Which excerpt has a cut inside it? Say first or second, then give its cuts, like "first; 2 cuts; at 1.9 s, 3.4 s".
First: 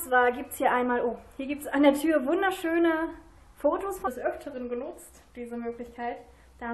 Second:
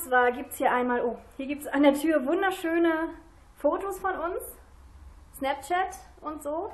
second; 1 cut; at 4.1 s